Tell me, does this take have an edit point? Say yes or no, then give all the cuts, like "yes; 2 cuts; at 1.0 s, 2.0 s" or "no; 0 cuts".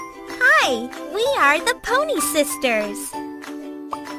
yes; 1 cut; at 2.9 s